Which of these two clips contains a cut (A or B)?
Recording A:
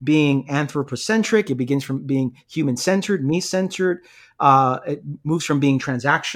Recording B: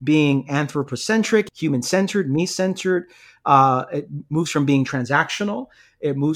B